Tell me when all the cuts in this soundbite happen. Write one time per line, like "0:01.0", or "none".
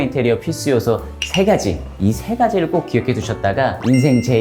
0:01.9